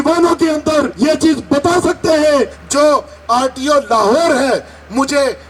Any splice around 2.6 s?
yes; 2 cuts; at 0.9 s, 2.6 s

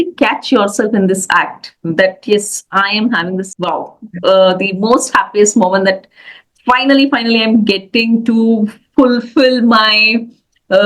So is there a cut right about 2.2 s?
no; 1 cut; at 3.5 s

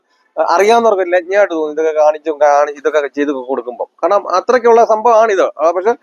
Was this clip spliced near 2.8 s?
no; 0 cuts

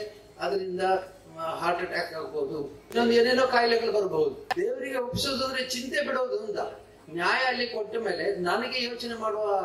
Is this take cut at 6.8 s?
no; 2 cuts; at 2.9 s, 4.4 s

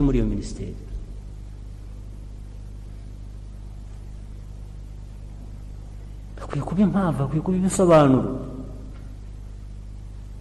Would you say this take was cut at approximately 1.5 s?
no; 0 cuts

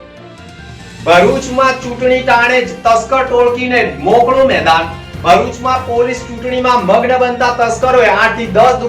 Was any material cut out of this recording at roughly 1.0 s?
yes; 1 cut; at 1.0 s

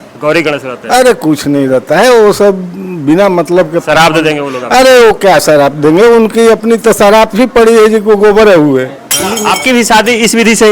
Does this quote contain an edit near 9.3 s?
yes; 1 cut; at 9.3 s

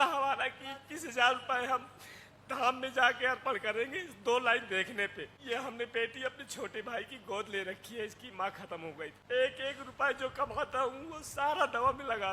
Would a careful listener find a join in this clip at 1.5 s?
no; 2 cuts; at 5.3 s, 9.2 s

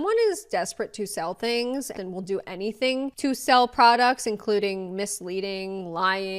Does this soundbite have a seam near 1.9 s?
yes; 1 cut; at 1.9 s

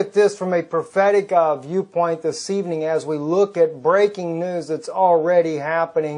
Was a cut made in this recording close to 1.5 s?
yes; 1 cut; at 1.5 s

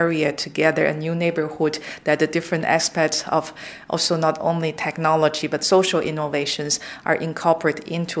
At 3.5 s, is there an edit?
no; 0 cuts

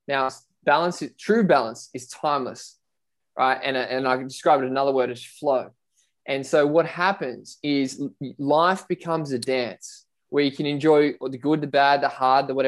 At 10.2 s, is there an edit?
no; 0 cuts

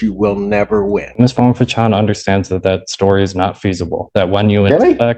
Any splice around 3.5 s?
no; 1 cut; at 1.1 s

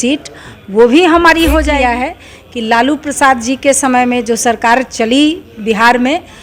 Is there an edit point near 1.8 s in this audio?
yes; 1 cut; at 1.8 s

